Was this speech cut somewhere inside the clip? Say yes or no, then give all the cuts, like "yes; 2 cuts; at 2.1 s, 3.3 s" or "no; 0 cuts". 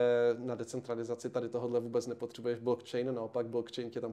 no; 0 cuts